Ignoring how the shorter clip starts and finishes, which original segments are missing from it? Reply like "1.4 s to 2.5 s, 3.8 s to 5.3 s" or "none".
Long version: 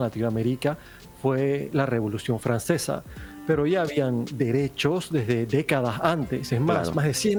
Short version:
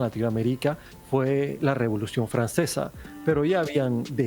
0.9 s to 1.0 s, 3.2 s to 3.3 s